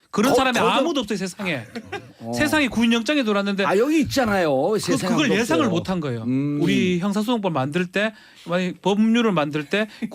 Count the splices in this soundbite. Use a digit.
0